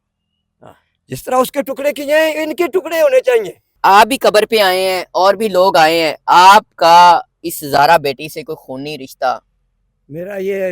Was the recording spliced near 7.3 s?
no; 1 cut; at 3.6 s

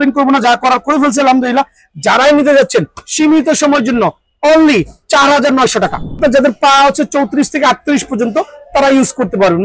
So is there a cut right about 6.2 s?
yes; 1 cut; at 6.2 s

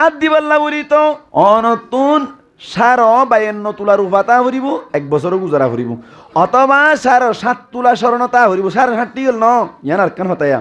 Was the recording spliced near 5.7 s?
no; 1 cut; at 1.2 s

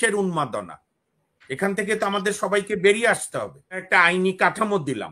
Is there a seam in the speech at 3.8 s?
yes; 1 cut; at 3.8 s

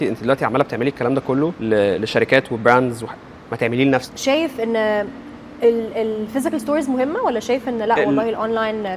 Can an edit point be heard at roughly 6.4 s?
no; 2 cuts; at 1.6 s, 4.1 s

